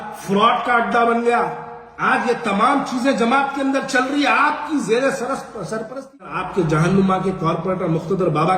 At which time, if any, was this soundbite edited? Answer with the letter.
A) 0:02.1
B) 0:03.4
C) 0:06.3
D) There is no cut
C